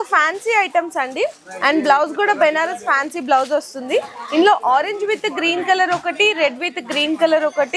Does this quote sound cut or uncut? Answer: uncut